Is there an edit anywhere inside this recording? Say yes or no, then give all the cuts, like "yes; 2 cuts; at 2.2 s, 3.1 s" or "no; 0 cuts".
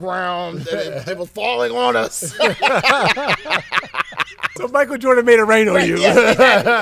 yes; 1 cut; at 4.6 s